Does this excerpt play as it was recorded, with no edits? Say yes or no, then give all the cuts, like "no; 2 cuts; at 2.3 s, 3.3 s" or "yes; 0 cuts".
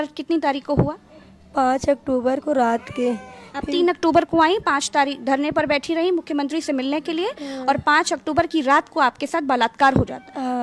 yes; 0 cuts